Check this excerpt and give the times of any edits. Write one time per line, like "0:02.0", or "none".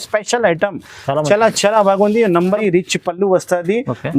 0:02.6